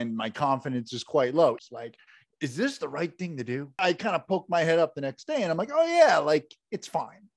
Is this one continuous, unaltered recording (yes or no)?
no